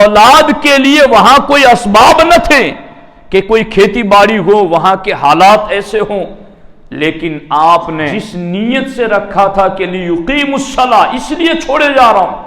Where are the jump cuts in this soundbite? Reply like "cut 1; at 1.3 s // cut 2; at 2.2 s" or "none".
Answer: cut 1; at 8.2 s